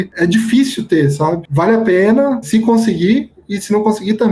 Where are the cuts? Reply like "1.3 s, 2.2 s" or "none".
1.4 s, 2.4 s